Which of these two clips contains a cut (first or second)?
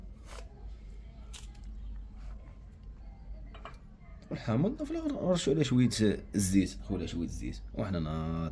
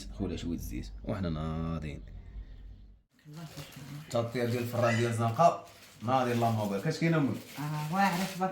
second